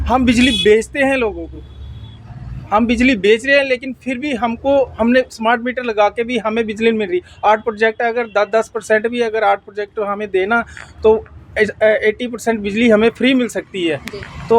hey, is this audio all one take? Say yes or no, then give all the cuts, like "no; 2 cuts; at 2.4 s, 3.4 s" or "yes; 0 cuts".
yes; 0 cuts